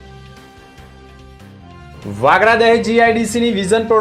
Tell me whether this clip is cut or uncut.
uncut